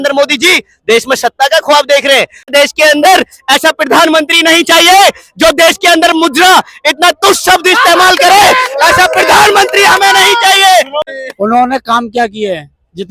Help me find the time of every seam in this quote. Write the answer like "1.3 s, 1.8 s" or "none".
2.5 s, 11.1 s